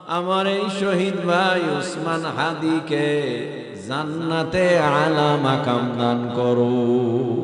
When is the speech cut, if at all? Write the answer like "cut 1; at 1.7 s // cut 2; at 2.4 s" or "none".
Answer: none